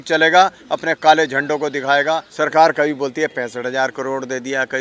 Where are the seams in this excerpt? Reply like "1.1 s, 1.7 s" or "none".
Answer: 2.3 s